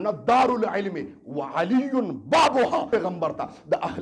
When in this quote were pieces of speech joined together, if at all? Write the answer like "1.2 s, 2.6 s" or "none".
2.9 s